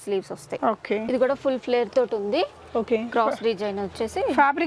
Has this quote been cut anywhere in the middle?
yes; 1 cut; at 1.0 s

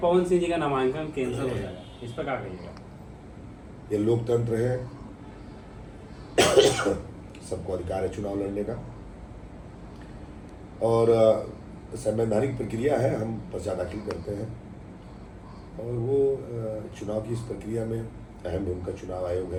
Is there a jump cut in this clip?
no; 0 cuts

